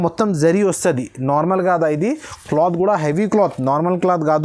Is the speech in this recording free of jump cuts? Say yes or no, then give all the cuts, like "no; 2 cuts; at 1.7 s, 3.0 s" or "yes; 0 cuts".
yes; 0 cuts